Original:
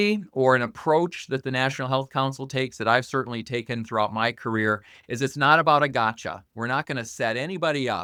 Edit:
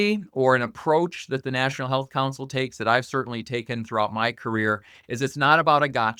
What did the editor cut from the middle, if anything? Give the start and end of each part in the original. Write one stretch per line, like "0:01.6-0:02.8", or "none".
none